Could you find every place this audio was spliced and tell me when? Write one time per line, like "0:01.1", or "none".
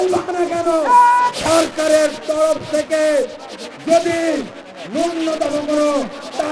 0:01.3